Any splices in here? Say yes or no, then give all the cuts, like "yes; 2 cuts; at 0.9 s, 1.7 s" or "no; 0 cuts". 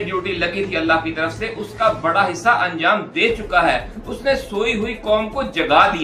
no; 0 cuts